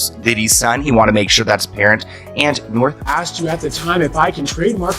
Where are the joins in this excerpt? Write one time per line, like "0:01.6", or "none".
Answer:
0:03.1